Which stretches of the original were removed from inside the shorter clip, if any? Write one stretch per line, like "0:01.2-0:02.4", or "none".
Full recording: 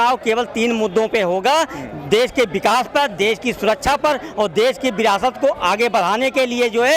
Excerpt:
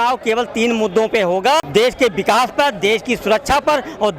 0:01.7-0:02.0

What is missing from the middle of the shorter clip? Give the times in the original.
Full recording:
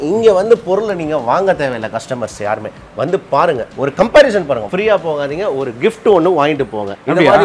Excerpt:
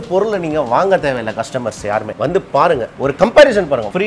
0:02.7-0:02.9

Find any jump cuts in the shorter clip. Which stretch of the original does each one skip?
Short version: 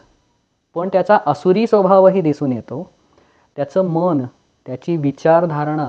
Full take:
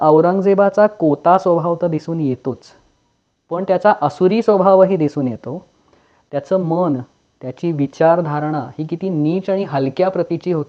none

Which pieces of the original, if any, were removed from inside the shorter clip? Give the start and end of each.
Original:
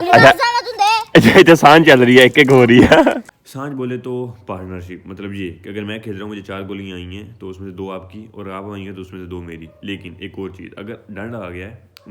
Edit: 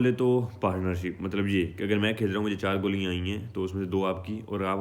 none

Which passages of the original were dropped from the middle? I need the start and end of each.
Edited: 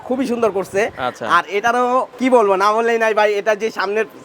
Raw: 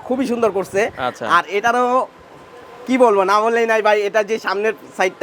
0:02.1-0:02.8

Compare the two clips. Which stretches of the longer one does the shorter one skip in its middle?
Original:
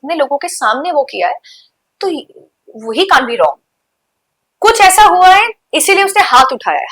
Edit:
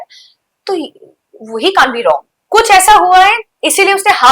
0:03.7-0:04.4

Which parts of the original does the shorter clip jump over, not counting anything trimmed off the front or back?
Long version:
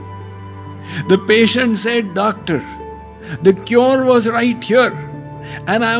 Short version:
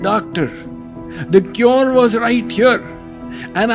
none

